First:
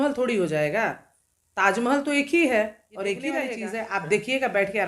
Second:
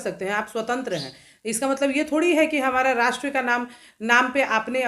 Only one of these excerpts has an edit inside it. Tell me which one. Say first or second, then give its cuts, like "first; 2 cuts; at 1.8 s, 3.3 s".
first; 1 cut; at 3.6 s